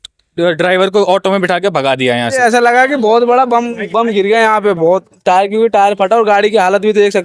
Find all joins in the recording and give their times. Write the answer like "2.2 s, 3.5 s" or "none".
2.4 s